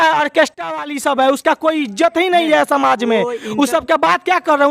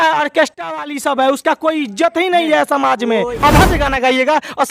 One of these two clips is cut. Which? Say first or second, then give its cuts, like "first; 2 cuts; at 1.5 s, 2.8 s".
second; 1 cut; at 3.4 s